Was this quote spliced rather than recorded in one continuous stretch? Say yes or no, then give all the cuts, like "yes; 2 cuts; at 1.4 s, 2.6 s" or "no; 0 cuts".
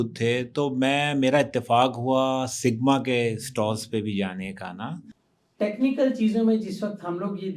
yes; 1 cut; at 5.1 s